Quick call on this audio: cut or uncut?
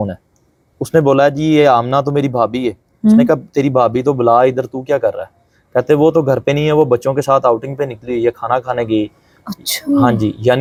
uncut